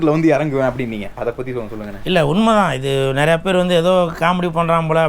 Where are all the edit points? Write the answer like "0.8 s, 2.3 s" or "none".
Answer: 1.6 s